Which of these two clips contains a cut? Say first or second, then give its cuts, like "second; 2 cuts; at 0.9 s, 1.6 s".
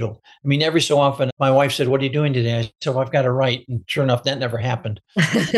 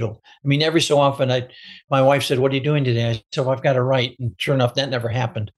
first; 1 cut; at 1.3 s